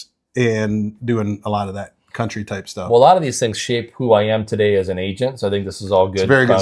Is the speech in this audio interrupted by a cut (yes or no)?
no